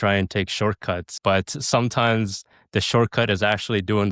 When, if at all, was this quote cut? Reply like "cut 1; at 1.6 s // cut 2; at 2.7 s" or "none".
none